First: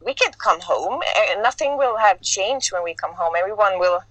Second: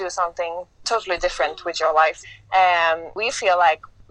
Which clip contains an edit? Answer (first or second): second